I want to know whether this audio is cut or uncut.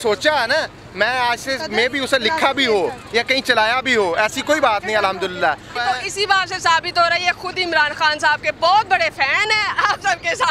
cut